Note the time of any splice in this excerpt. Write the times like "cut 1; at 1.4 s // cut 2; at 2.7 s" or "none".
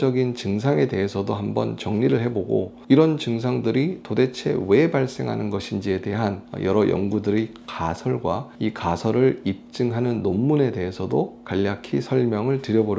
cut 1; at 6.5 s // cut 2; at 8.5 s